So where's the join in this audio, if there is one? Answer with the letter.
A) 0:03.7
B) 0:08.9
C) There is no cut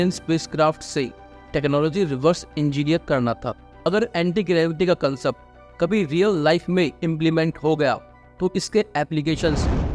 A